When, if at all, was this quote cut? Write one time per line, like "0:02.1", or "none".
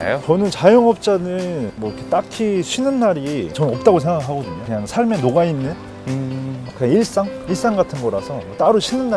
none